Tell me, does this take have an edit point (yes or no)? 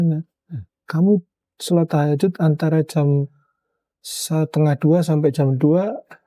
no